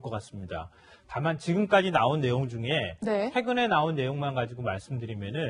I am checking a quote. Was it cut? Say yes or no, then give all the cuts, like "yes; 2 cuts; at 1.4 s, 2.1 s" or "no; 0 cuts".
no; 0 cuts